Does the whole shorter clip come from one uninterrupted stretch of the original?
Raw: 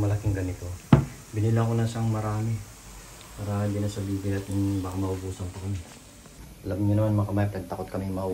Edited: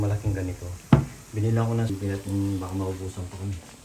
no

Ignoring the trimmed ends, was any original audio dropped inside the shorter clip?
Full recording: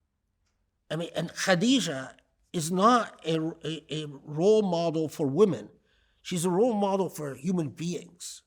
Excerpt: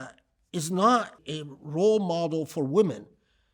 yes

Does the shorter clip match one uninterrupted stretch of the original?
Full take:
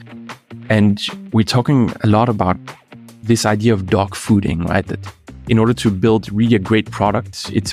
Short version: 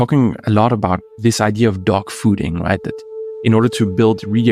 no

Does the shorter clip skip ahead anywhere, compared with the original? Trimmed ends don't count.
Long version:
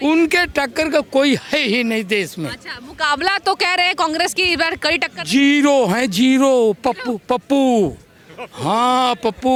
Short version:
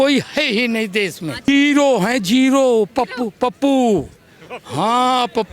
yes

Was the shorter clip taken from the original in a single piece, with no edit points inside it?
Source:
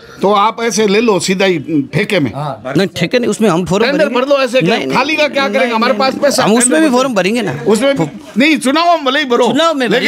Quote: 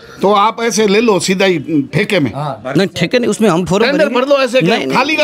yes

